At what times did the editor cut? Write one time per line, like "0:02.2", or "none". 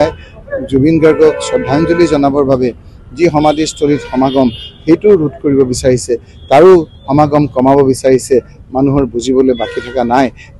none